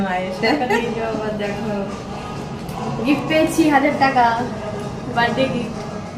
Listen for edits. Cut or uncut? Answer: uncut